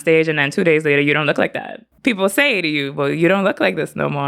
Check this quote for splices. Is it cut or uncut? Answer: cut